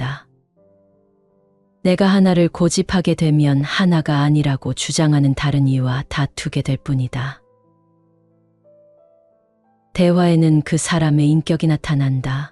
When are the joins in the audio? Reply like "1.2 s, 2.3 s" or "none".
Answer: 7.4 s, 9.8 s